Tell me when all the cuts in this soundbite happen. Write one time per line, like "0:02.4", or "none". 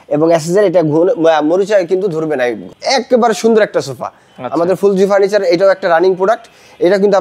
0:02.7